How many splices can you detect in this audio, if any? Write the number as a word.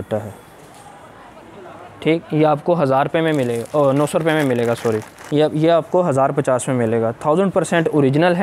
one